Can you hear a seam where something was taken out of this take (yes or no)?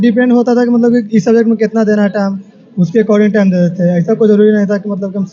no